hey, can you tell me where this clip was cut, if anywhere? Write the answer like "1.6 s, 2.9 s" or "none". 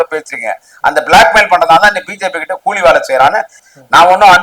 3.5 s